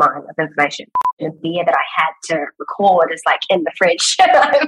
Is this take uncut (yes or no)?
no